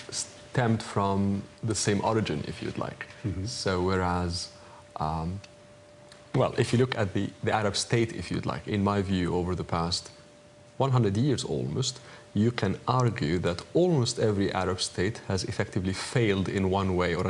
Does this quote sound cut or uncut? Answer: cut